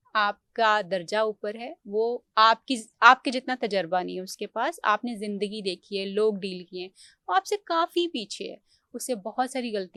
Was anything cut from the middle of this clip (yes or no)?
no